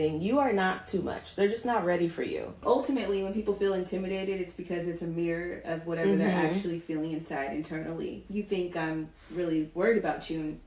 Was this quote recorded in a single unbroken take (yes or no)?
no